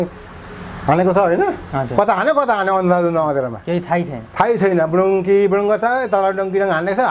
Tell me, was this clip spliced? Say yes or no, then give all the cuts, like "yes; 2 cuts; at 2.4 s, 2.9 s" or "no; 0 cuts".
no; 0 cuts